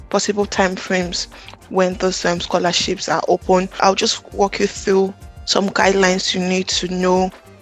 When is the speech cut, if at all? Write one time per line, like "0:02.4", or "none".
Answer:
0:03.7